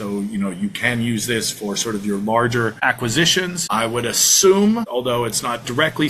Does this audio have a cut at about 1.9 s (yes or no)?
no